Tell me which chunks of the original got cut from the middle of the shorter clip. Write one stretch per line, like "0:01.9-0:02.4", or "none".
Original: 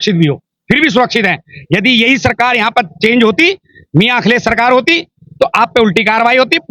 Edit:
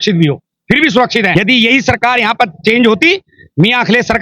0:01.3-0:01.7